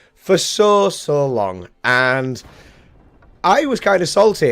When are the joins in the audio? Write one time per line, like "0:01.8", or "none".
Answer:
none